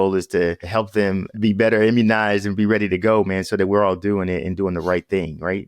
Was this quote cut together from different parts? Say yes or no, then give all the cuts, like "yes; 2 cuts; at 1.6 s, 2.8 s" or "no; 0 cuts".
yes; 1 cut; at 1.3 s